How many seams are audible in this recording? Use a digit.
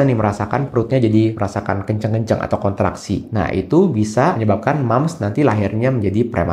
2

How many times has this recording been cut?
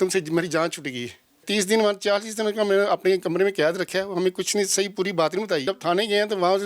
2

